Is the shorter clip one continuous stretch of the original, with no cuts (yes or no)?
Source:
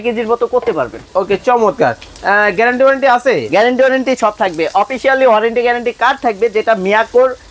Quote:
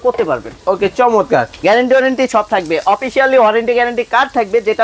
no